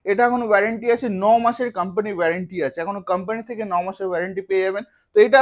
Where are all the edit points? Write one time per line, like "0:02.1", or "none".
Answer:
none